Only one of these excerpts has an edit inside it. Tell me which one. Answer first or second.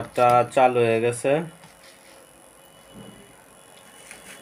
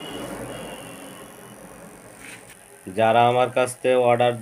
second